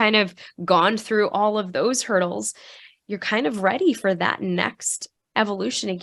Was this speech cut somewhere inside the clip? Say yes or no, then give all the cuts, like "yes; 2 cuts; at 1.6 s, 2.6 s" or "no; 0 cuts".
no; 0 cuts